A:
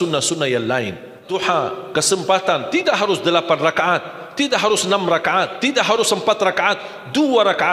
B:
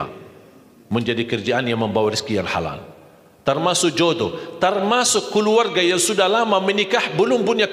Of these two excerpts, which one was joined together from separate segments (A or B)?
A